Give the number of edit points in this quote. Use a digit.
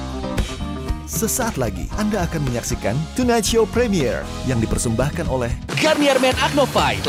0